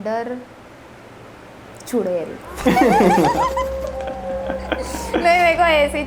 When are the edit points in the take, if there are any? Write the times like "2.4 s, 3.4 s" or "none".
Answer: none

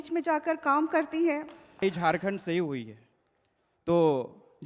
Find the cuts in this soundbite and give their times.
1.8 s

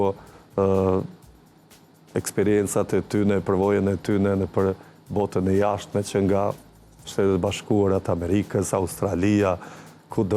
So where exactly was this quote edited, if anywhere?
none

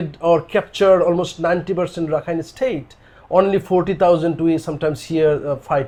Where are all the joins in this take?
none

